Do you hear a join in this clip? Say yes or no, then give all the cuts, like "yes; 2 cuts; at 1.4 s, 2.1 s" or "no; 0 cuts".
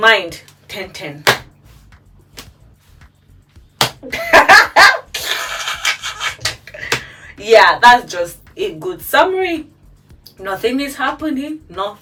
no; 0 cuts